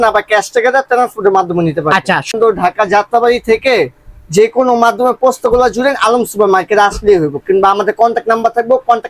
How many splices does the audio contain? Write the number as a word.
one